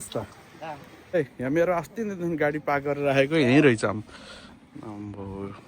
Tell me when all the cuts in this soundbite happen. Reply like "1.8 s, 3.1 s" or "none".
1.1 s